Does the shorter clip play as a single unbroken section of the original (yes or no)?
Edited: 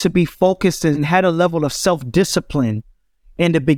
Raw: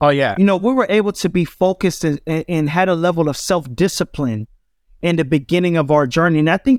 no